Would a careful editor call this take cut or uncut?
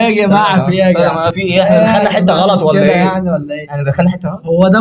cut